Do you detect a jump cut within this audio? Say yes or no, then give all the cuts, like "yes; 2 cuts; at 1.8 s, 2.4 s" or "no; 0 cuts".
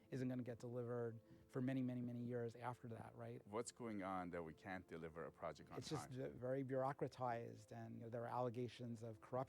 yes; 3 cuts; at 3.4 s, 6.4 s, 8.1 s